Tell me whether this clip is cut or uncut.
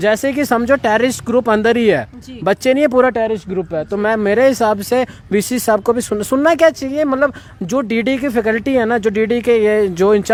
uncut